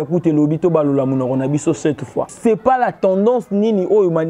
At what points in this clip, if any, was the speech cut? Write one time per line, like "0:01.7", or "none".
0:02.3